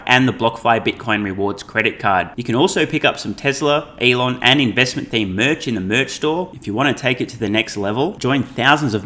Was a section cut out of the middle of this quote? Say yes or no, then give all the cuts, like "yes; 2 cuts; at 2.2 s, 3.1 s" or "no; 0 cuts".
no; 0 cuts